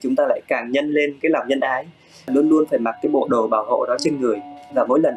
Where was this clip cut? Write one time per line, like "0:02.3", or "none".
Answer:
0:02.1